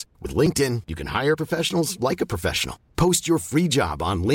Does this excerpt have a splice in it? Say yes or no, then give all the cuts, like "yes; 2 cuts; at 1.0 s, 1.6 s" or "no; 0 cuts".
no; 0 cuts